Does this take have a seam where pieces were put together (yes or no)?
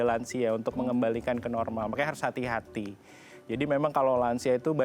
no